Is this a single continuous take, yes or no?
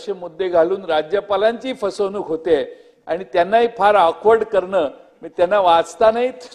yes